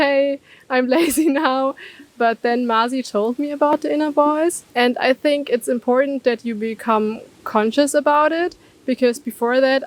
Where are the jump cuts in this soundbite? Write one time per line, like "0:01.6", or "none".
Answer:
none